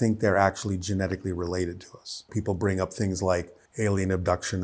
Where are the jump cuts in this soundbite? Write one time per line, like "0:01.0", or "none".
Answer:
0:02.3